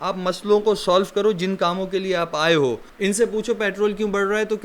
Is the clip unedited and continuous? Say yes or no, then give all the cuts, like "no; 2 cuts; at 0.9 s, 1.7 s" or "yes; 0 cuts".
no; 1 cut; at 2.9 s